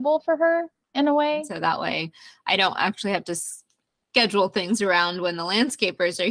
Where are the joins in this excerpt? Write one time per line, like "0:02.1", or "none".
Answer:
0:01.5